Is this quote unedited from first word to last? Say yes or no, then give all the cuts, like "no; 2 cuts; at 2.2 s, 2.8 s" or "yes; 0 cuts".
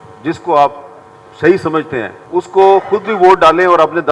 no; 1 cut; at 2.2 s